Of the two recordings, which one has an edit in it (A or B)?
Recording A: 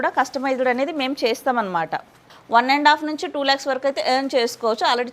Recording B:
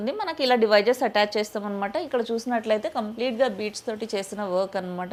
A